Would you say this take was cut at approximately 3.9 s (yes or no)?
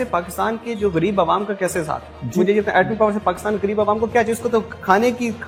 no